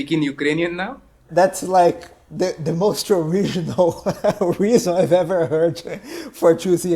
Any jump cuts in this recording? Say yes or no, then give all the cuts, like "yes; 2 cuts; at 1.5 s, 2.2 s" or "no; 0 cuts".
yes; 1 cut; at 1.3 s